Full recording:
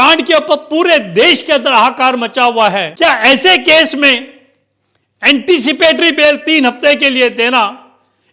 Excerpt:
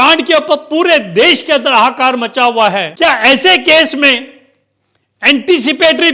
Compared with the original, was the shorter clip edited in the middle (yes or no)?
no